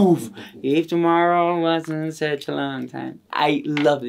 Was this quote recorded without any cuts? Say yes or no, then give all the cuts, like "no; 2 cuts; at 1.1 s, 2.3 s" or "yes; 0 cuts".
no; 1 cut; at 3.2 s